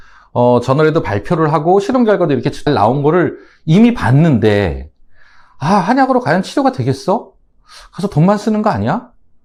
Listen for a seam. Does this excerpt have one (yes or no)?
no